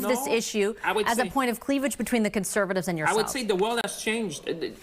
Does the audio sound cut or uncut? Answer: cut